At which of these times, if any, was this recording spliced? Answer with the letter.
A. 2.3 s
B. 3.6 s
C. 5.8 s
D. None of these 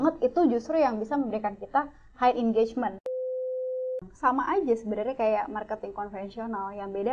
B